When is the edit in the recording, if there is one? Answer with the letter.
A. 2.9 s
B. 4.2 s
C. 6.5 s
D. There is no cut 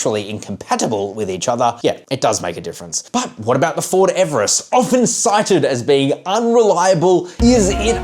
A